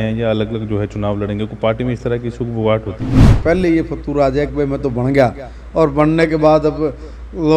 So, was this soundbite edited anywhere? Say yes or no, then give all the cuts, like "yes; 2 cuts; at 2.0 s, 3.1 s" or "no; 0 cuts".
yes; 1 cut; at 3.4 s